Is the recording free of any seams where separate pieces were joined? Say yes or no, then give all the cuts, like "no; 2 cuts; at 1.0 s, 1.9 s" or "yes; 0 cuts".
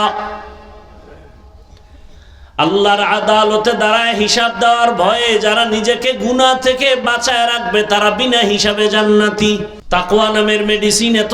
no; 1 cut; at 9.7 s